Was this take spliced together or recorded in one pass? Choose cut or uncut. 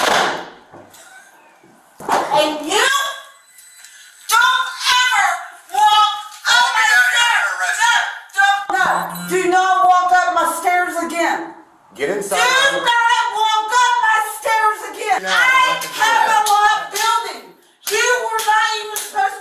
cut